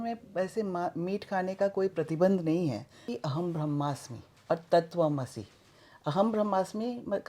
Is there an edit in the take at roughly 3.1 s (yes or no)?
yes